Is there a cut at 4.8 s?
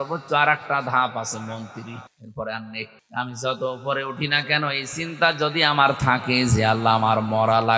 no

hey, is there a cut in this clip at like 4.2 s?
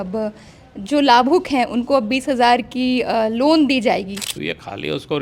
yes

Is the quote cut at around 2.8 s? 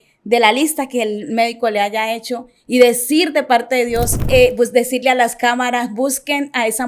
no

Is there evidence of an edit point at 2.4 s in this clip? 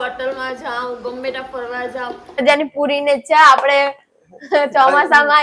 yes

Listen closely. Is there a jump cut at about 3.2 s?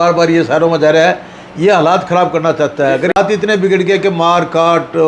yes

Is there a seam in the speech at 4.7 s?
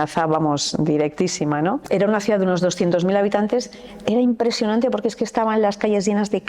no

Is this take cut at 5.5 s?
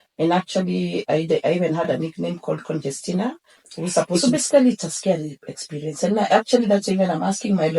no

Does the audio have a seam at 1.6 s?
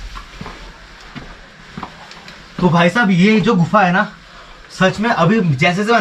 yes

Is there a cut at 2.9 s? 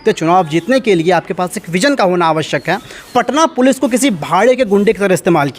yes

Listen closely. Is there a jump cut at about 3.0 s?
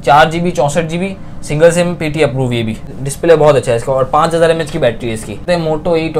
yes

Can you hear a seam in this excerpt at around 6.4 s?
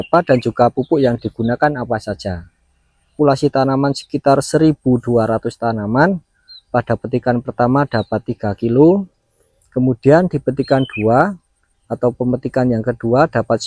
no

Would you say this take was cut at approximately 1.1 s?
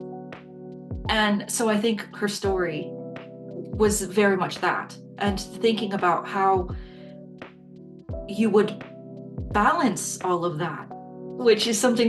yes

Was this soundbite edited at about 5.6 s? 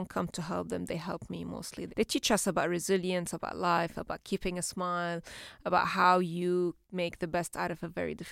no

